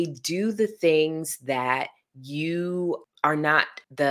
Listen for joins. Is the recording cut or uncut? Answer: uncut